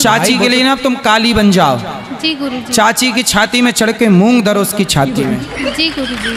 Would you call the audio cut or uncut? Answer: uncut